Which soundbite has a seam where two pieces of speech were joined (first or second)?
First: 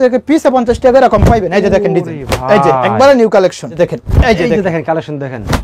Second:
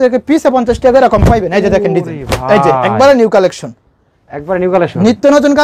first